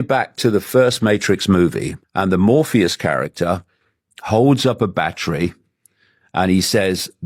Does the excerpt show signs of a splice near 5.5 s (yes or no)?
no